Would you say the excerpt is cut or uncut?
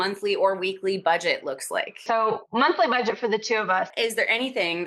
cut